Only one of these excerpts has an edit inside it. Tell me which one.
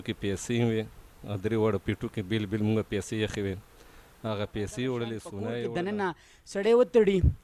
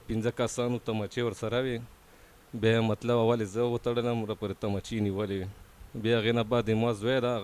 first; 1 cut; at 5.5 s

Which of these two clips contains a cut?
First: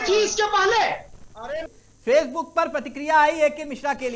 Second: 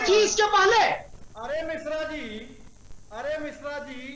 first; 1 cut; at 1.7 s

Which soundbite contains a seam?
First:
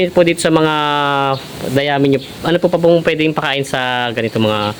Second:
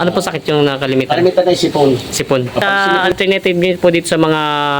second; 1 cut; at 2.6 s

